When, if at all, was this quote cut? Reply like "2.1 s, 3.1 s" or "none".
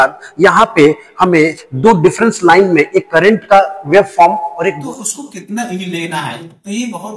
4.8 s